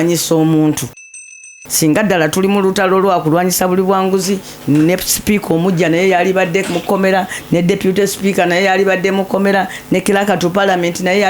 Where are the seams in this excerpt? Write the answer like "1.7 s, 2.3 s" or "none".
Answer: 1.6 s